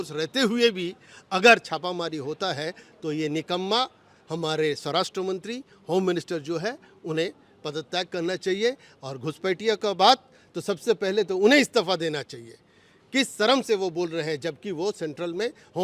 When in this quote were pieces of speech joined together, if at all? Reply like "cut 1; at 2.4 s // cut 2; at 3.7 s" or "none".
none